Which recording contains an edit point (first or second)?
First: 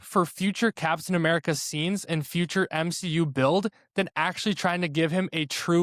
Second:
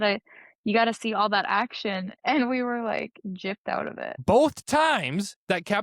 second